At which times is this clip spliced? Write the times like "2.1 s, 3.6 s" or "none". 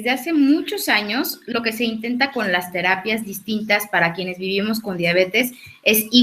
none